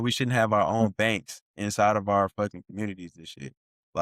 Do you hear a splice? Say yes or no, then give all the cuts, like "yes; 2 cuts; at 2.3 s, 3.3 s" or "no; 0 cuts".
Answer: no; 0 cuts